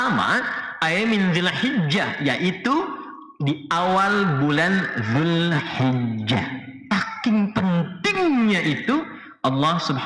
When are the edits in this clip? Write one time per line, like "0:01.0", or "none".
0:06.7